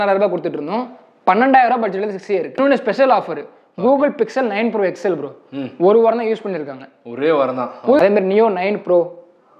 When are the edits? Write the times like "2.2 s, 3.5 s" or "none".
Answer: 2.6 s, 8.0 s